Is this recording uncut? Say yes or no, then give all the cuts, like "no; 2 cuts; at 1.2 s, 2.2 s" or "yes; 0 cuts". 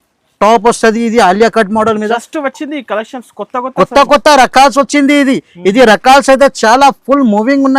yes; 0 cuts